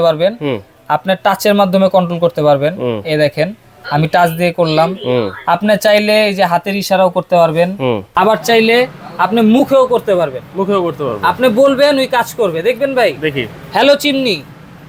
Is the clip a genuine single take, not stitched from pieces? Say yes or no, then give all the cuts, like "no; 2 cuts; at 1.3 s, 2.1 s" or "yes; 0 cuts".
yes; 0 cuts